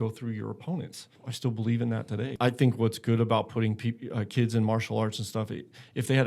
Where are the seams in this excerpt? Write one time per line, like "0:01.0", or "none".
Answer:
0:01.2
0:02.3